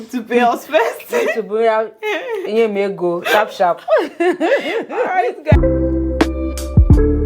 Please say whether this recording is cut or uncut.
cut